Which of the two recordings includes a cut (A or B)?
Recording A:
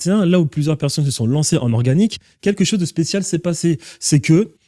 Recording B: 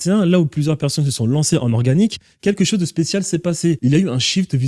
B